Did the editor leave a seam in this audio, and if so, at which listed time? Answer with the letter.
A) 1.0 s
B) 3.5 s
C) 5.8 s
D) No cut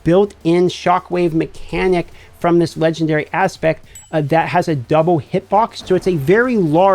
C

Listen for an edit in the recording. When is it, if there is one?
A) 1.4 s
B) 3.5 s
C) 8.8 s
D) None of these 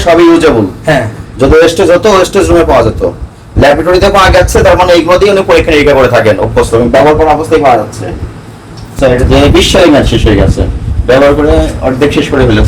C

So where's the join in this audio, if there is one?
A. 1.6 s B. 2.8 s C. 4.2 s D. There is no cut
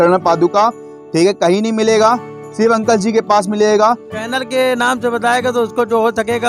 C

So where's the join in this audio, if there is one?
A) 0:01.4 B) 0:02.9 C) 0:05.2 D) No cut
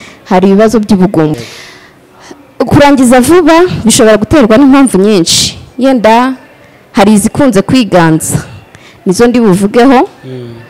A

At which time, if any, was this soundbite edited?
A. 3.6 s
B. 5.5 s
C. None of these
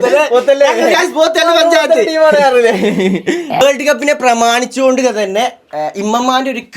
A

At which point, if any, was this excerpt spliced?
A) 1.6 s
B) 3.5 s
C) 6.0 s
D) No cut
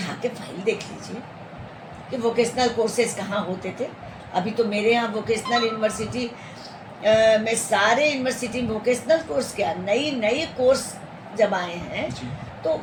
D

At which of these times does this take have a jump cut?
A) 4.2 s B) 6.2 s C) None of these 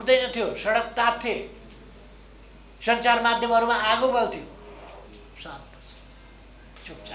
C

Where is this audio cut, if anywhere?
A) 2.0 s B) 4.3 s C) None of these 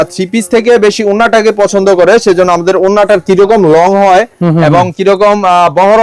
C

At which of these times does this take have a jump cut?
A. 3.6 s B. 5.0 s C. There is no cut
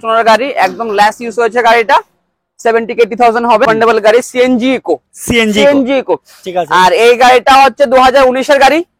A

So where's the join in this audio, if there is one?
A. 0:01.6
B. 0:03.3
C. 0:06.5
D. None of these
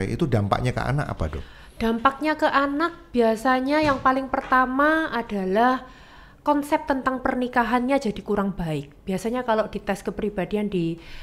D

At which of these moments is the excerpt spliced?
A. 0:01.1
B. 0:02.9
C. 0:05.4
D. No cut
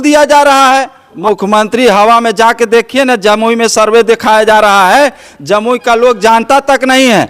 A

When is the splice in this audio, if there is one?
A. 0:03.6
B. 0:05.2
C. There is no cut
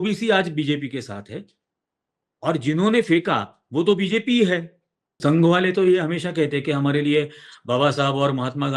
B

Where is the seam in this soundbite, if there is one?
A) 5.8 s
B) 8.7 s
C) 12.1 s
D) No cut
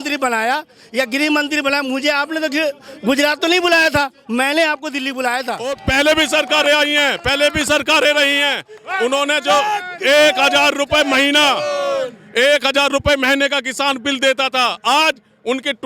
A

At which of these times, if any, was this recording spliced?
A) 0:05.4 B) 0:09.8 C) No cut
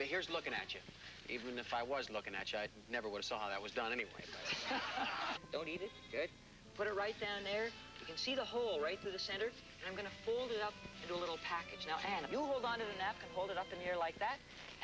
C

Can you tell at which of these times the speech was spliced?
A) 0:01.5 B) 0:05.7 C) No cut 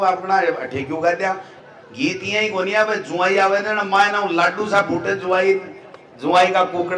A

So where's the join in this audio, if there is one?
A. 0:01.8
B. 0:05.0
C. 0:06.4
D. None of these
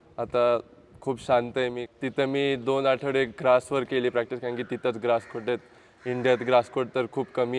A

